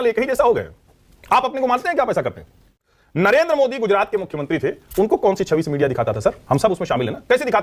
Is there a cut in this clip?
yes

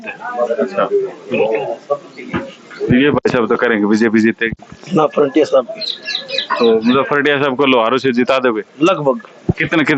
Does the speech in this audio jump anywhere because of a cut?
no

